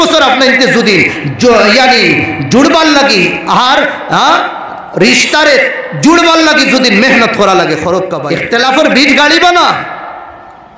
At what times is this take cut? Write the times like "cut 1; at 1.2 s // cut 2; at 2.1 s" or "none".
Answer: cut 1; at 8.1 s